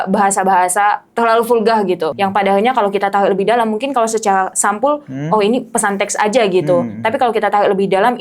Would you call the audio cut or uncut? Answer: cut